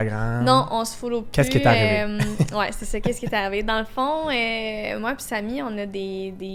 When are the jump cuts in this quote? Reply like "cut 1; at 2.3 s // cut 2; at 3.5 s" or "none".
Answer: none

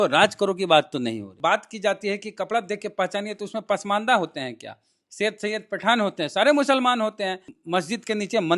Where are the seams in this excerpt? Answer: cut 1; at 1.3 s // cut 2; at 7.5 s

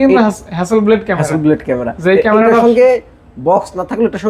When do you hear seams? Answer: none

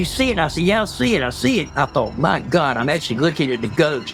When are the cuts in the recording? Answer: none

